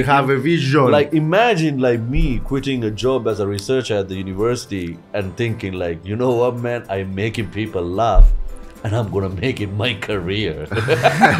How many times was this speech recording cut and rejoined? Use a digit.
0